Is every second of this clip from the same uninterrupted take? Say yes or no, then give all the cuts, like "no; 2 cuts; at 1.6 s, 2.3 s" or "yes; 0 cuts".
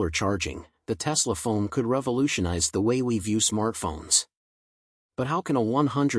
yes; 0 cuts